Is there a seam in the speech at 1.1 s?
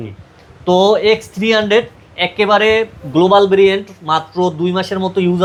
no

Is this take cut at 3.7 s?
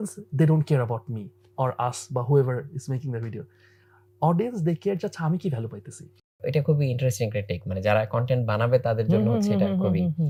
no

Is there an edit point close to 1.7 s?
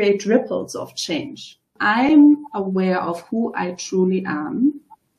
yes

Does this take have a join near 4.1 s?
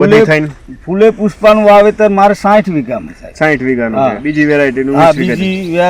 no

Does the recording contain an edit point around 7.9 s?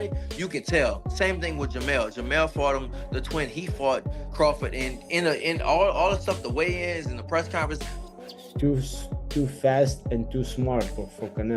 yes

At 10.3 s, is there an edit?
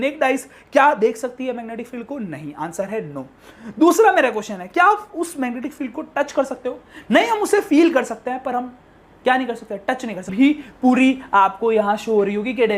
yes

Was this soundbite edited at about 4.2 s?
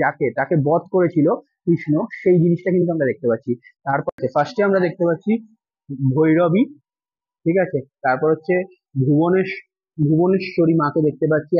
yes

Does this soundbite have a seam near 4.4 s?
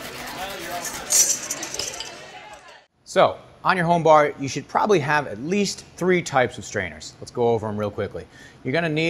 no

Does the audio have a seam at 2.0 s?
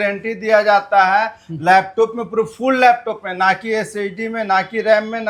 no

